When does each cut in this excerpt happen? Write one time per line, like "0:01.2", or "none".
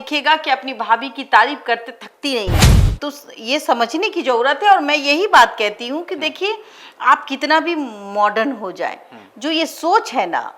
0:02.5

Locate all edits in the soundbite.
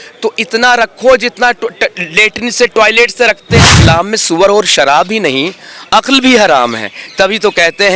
0:03.7

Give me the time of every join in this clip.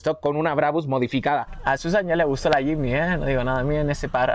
0:01.5

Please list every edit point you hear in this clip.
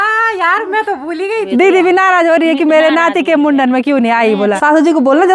0:01.5
0:04.6

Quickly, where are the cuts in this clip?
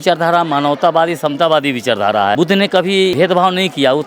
0:02.4
0:03.1

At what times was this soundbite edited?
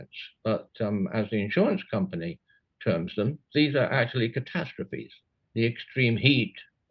0:05.1

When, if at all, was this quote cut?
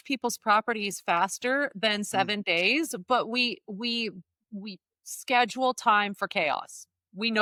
none

